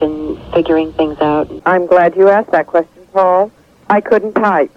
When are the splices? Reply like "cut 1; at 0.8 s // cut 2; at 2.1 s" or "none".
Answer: cut 1; at 1.6 s

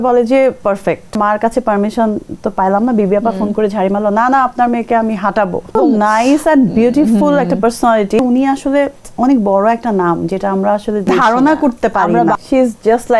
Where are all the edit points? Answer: cut 1; at 1.2 s // cut 2; at 5.8 s // cut 3; at 8.2 s // cut 4; at 11.1 s // cut 5; at 12.4 s

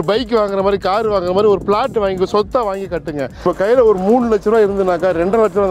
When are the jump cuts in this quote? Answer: cut 1; at 3.4 s

